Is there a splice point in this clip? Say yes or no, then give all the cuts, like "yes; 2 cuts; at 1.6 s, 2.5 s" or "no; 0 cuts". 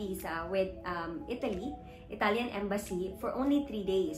no; 0 cuts